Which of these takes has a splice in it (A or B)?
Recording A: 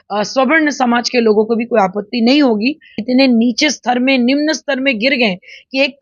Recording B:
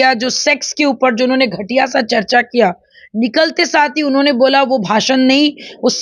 A